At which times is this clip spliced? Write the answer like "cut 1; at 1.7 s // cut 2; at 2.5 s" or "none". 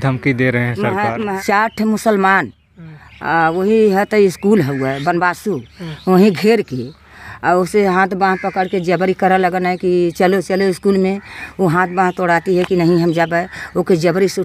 cut 1; at 1.3 s